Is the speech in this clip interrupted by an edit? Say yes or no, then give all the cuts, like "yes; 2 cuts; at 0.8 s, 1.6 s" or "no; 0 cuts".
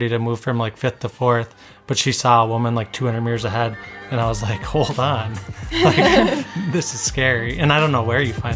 no; 0 cuts